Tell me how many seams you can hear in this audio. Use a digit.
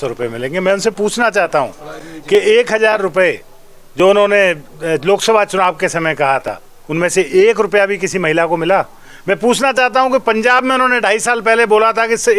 0